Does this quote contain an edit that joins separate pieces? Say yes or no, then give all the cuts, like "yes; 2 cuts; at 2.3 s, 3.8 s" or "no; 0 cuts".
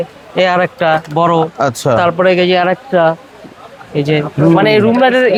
no; 0 cuts